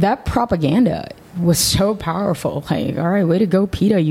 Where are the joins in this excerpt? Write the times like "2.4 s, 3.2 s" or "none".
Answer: none